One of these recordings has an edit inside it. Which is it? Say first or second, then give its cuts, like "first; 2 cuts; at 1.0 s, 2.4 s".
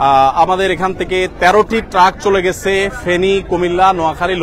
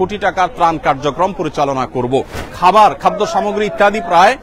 second; 1 cut; at 2.4 s